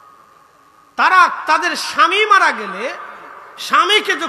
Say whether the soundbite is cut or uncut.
uncut